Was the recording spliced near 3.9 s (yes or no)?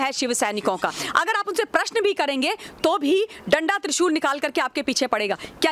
no